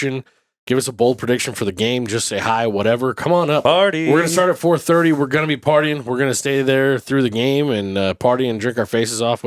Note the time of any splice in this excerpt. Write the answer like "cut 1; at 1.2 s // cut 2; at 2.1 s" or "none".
cut 1; at 3.6 s